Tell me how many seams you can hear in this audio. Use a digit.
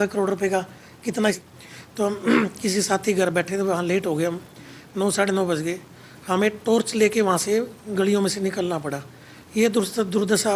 1